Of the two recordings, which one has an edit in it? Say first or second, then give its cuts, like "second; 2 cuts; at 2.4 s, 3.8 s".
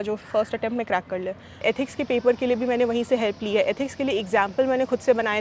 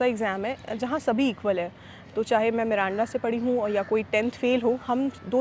first; 1 cut; at 1.6 s